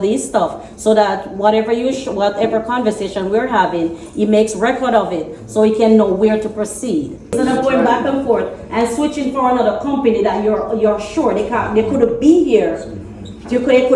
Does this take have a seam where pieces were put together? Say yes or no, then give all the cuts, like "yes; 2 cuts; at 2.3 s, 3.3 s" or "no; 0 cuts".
yes; 1 cut; at 7.3 s